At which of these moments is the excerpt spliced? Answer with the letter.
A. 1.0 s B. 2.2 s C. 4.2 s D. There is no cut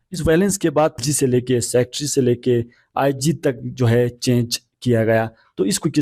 A